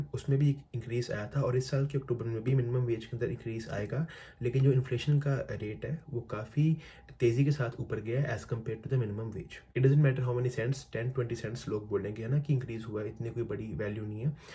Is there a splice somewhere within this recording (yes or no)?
yes